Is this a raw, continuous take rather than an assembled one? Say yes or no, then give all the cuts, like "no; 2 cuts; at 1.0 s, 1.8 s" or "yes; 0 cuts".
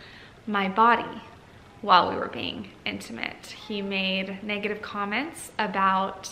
yes; 0 cuts